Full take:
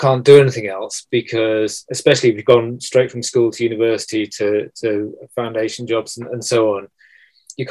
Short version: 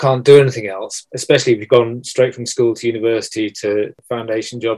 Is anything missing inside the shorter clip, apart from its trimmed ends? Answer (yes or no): yes